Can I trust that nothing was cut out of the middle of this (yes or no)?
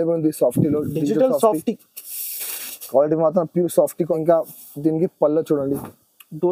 no